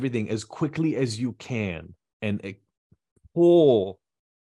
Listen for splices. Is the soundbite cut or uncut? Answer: cut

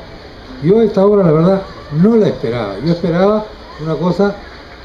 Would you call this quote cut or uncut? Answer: cut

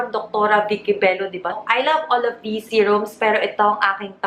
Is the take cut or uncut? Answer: cut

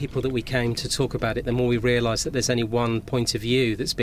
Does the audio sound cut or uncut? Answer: uncut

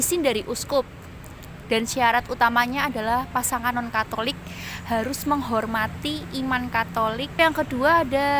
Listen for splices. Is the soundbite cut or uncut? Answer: cut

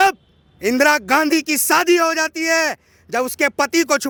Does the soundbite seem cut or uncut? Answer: uncut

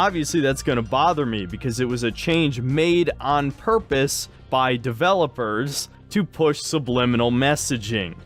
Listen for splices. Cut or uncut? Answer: uncut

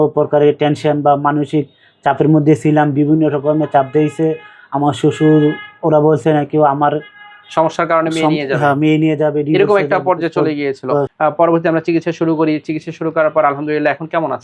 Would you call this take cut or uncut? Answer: cut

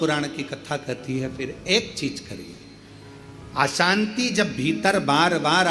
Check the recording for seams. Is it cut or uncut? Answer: uncut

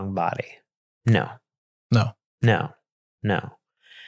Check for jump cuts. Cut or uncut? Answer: uncut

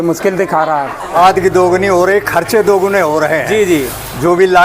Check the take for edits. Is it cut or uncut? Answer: cut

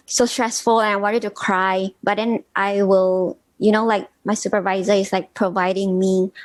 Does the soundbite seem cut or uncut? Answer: uncut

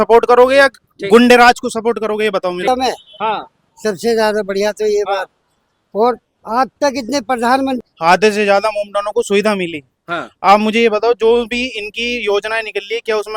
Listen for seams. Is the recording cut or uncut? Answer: cut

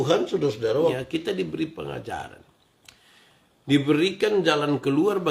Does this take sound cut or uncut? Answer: cut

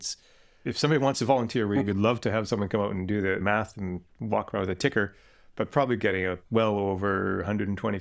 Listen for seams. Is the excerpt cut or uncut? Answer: uncut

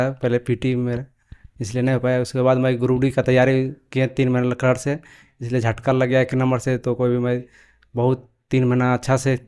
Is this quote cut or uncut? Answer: uncut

